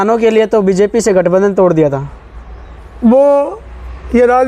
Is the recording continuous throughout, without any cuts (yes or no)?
yes